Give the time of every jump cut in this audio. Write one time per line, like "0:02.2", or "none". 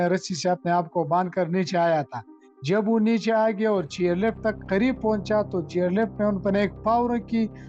none